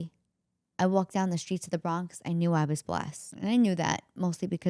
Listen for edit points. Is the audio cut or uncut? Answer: cut